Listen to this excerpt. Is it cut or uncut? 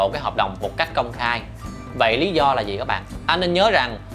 cut